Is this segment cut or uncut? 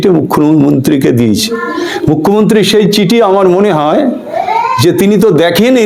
uncut